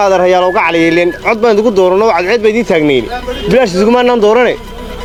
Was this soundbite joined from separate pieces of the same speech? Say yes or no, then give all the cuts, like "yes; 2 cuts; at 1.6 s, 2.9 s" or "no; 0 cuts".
no; 0 cuts